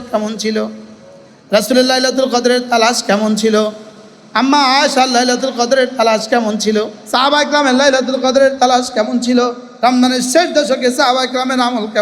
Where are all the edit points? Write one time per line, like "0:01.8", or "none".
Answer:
0:07.0
0:09.6

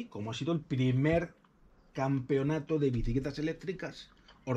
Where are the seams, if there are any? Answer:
none

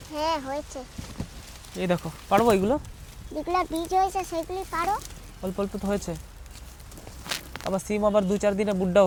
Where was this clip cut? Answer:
none

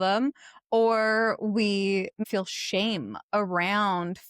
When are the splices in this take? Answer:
0:02.2

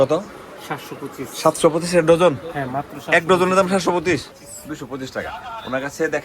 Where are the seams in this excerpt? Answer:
0:04.3

